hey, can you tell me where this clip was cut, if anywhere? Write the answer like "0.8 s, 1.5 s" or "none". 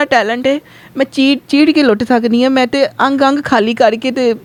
none